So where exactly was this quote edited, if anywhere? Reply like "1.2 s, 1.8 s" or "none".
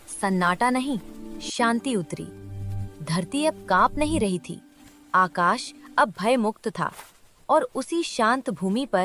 none